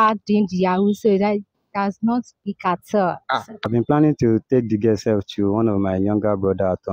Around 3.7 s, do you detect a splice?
yes; 1 cut; at 3.7 s

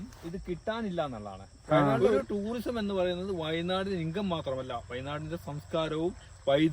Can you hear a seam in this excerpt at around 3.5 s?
no; 1 cut; at 2.1 s

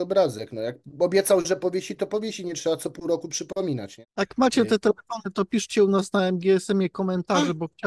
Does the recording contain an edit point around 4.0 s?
yes; 1 cut; at 4.0 s

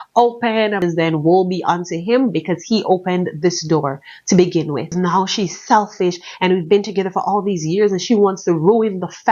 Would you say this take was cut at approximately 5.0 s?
yes; 2 cuts; at 0.8 s, 5.0 s

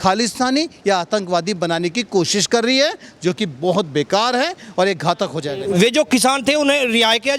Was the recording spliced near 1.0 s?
no; 1 cut; at 5.5 s

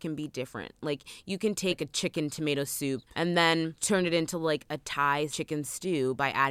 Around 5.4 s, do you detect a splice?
yes; 4 cuts; at 1.8 s, 3.1 s, 3.8 s, 5.4 s

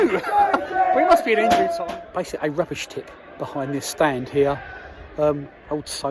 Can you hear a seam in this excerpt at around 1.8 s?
yes; 1 cut; at 1.8 s

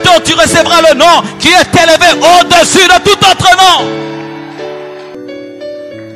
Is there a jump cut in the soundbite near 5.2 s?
yes; 1 cut; at 5.2 s

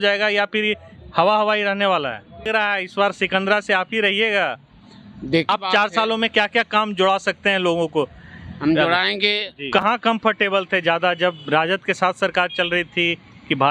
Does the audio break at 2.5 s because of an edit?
yes; 3 cuts; at 2.5 s, 5.5 s, 9.6 s

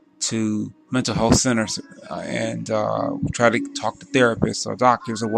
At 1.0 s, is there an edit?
no; 1 cut; at 3.8 s

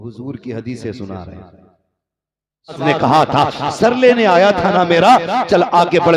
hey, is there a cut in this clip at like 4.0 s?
no; 1 cut; at 2.8 s

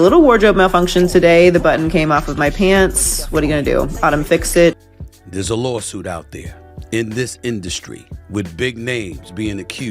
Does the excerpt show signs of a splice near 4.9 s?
yes; 1 cut; at 4.9 s

